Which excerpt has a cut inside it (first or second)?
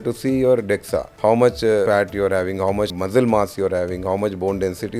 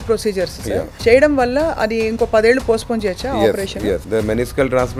first